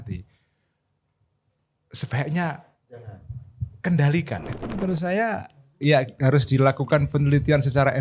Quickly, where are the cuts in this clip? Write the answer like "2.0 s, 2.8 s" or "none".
4.7 s